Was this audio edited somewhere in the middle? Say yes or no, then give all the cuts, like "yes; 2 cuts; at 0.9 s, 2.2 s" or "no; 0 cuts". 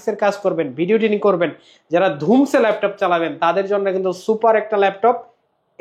no; 0 cuts